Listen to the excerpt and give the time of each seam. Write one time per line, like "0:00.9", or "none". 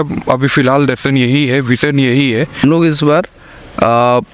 0:02.6